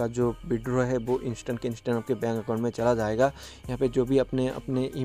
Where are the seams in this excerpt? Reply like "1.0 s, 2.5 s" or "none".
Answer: none